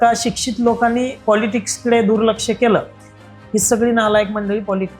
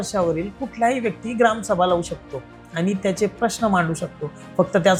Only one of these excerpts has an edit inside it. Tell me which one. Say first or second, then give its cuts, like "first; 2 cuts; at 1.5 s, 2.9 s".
first; 1 cut; at 1.2 s